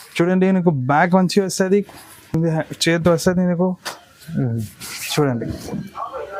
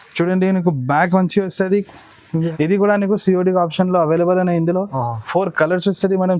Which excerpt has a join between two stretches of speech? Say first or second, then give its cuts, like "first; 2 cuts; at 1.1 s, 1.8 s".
second; 1 cut; at 2.3 s